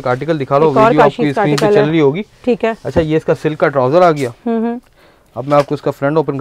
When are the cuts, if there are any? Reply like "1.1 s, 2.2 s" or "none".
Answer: none